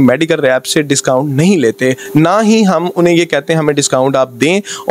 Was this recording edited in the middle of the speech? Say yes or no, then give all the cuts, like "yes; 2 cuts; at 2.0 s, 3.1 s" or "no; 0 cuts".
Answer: no; 0 cuts